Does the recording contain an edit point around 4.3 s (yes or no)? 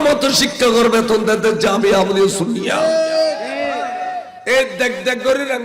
yes